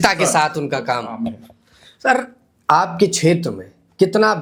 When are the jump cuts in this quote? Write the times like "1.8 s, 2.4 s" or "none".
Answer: none

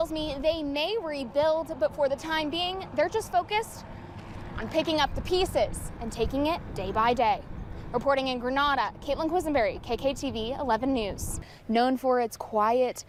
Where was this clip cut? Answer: none

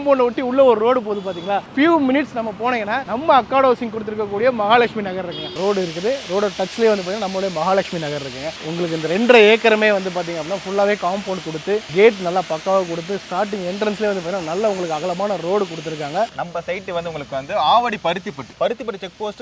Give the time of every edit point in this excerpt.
1.7 s, 5.6 s, 8.6 s, 16.3 s, 18.4 s

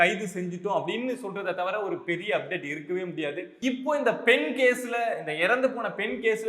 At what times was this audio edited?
3.5 s

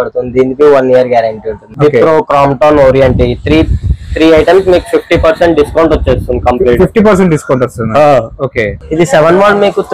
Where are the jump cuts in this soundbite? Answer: 1.6 s, 8.7 s

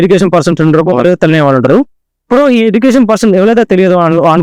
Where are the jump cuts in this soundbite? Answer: none

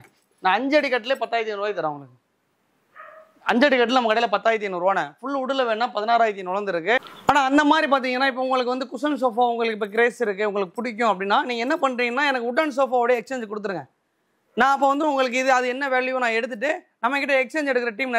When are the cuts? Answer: 7.1 s

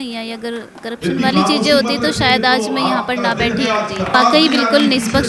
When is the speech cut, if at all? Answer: 4.1 s

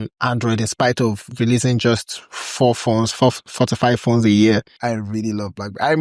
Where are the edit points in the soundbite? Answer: 4.7 s

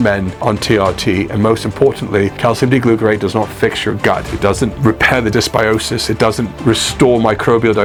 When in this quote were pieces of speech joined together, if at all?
none

